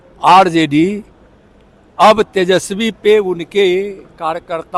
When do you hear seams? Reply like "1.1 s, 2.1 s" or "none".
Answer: none